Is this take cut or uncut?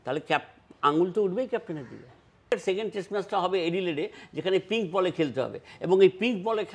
cut